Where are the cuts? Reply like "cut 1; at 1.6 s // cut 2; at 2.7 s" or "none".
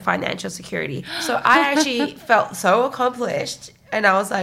cut 1; at 1.1 s